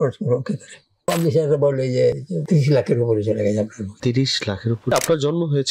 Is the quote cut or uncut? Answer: cut